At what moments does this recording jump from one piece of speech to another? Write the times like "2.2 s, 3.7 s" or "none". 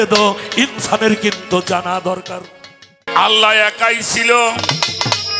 3.0 s